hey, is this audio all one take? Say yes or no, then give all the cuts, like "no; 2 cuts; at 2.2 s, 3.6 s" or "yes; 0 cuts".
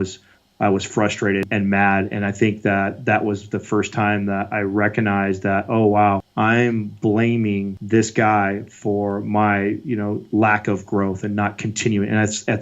no; 3 cuts; at 1.5 s, 6.3 s, 7.8 s